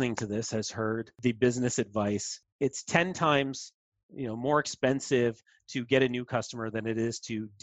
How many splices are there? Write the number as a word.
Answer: two